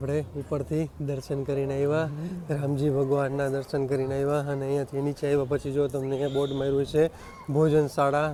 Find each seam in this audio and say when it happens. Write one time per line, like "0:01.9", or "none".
none